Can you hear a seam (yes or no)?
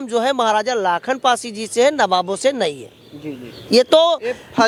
no